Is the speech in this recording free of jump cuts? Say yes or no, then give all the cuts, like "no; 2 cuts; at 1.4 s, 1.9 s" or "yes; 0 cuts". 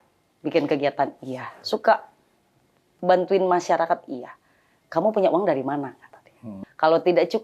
no; 1 cut; at 6.5 s